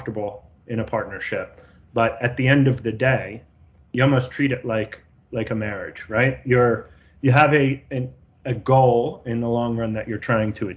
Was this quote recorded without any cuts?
yes; 0 cuts

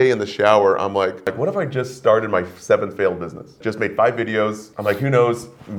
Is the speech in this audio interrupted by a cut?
yes; 3 cuts; at 1.3 s, 3.6 s, 4.7 s

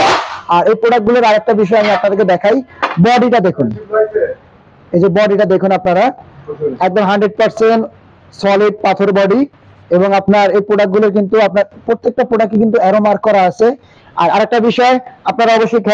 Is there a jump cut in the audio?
no; 0 cuts

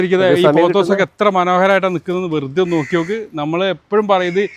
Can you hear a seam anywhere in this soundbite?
no; 0 cuts

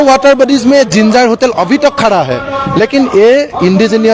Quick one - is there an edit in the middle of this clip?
no; 0 cuts

